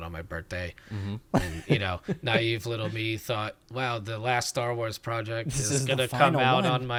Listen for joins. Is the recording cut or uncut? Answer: uncut